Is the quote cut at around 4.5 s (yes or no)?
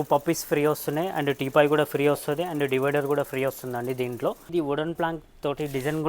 yes